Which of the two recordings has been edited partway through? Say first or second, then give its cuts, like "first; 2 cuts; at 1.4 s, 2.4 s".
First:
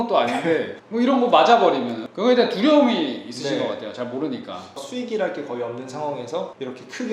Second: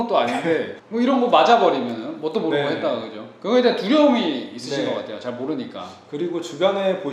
first; 2 cuts; at 2.0 s, 4.8 s